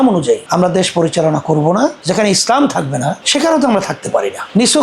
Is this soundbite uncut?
no; 1 cut; at 2.0 s

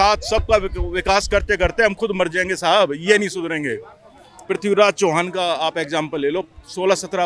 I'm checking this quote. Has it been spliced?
no; 0 cuts

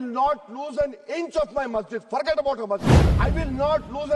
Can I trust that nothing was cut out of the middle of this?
no; 1 cut; at 3.0 s

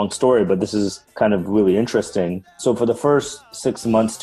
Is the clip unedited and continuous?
yes; 0 cuts

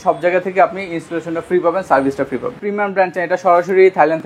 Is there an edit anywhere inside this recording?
yes; 1 cut; at 2.5 s

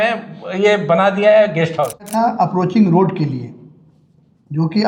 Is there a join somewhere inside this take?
yes; 1 cut; at 2.1 s

